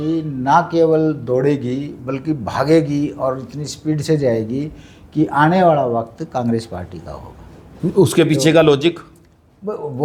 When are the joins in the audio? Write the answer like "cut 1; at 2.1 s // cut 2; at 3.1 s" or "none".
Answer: none